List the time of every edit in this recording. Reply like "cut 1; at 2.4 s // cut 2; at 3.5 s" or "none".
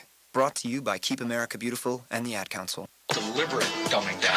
cut 1; at 3.0 s